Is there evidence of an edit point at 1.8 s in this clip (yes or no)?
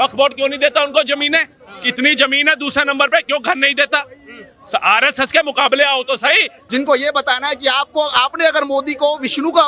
no